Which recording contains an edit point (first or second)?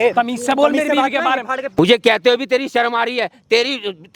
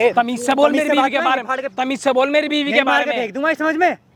first